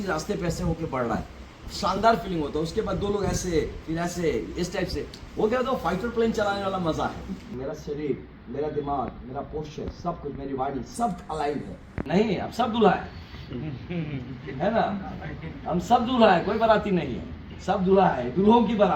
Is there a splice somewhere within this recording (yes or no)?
yes